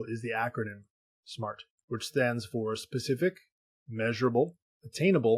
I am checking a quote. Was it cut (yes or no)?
yes